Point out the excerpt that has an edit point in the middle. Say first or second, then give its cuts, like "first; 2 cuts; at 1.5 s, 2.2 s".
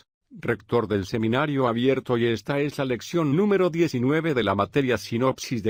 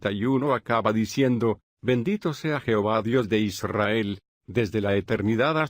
second; 1 cut; at 1.7 s